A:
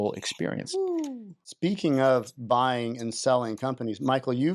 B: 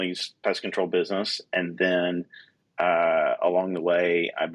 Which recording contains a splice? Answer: A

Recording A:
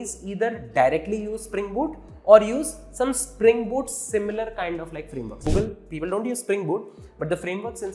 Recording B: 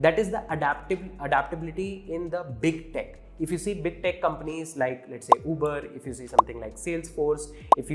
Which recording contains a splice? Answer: A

